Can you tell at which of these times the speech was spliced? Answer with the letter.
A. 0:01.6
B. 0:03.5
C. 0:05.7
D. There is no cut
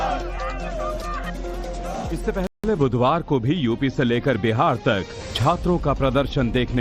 D